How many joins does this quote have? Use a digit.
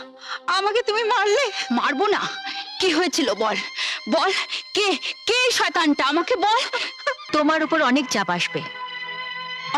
1